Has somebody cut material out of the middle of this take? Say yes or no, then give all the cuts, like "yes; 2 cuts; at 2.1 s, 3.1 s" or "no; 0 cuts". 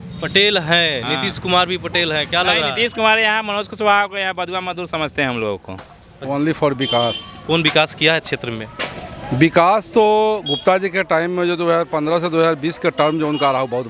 yes; 1 cut; at 6.1 s